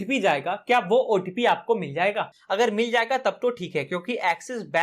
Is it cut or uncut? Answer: uncut